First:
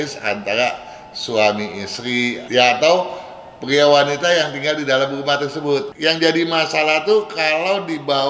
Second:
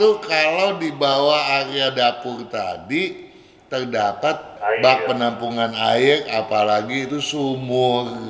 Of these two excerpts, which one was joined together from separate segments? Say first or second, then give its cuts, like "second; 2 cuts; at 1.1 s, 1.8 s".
first; 2 cuts; at 2.4 s, 5.9 s